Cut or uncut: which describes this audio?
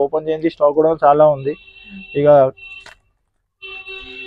uncut